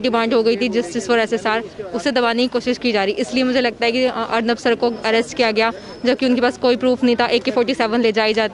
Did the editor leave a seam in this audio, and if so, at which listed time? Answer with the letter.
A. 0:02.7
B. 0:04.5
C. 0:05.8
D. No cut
D